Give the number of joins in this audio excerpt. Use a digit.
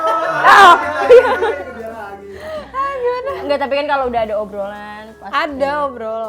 0